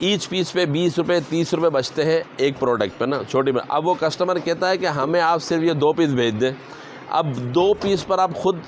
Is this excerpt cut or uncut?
uncut